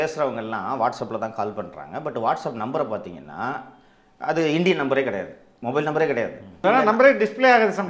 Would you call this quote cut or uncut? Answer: cut